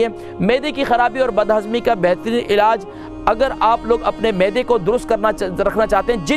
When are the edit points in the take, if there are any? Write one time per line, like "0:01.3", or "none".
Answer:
none